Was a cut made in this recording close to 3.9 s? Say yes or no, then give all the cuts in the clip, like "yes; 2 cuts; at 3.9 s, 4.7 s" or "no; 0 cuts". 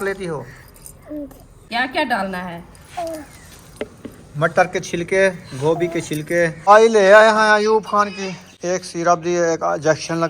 no; 2 cuts; at 1.5 s, 6.7 s